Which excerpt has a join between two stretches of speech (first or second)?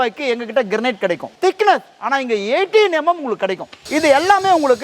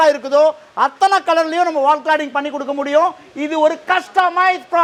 first